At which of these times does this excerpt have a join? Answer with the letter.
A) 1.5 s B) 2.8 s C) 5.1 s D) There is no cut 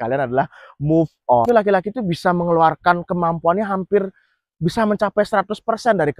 A